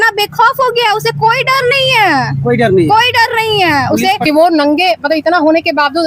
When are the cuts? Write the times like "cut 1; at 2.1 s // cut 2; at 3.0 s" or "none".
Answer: cut 1; at 4.3 s